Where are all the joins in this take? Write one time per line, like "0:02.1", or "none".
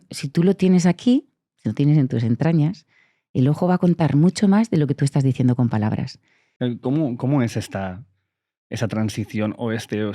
0:06.4